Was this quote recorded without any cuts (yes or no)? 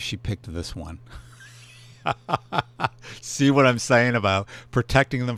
yes